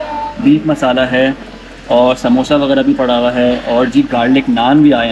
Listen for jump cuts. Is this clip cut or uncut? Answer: uncut